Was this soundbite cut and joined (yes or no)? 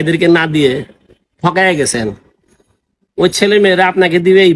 no